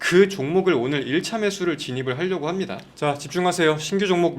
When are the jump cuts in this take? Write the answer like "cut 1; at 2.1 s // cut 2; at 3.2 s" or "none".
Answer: cut 1; at 2.8 s